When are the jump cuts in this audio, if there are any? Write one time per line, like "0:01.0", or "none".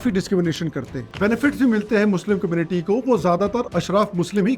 0:01.1